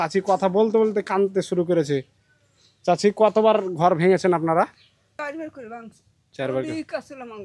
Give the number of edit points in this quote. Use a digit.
1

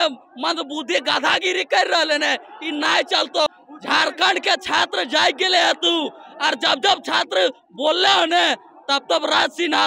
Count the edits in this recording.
1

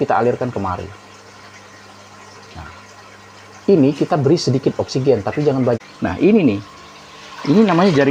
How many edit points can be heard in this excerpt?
1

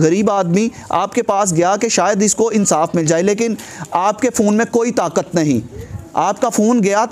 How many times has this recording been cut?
0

